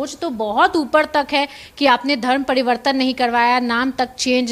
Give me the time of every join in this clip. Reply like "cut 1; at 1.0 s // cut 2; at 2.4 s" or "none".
none